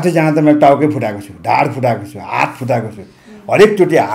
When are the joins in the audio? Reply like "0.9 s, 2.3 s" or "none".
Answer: none